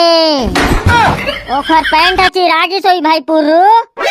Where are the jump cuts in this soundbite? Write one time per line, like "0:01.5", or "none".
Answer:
none